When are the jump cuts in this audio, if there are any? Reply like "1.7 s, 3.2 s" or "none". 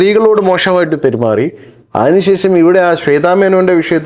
none